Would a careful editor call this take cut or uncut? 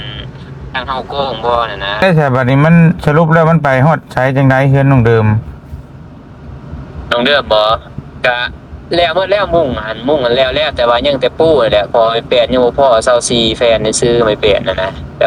cut